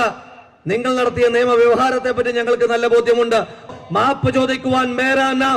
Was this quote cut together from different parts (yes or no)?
yes